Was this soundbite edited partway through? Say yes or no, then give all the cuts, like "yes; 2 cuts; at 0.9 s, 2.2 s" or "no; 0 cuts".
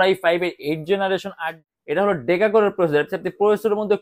yes; 1 cut; at 1.4 s